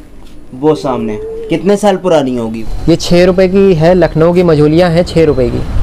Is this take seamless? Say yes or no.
no